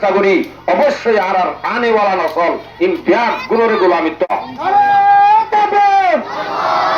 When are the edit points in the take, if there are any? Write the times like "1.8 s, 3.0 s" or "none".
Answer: 4.3 s